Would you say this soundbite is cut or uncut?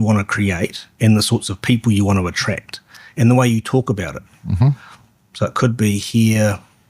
uncut